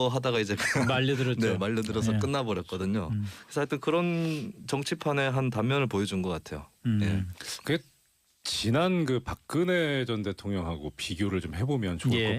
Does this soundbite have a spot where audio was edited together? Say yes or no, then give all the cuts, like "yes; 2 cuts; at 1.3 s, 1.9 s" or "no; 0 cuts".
yes; 1 cut; at 3.9 s